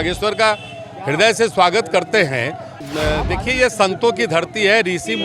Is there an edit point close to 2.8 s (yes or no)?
yes